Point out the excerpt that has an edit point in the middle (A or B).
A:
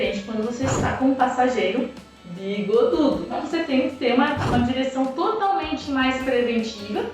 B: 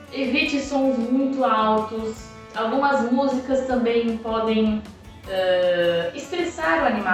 A